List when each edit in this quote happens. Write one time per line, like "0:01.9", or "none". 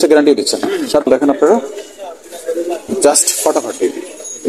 0:01.1